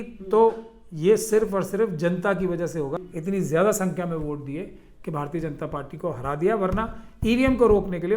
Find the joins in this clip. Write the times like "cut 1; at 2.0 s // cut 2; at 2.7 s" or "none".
cut 1; at 3.0 s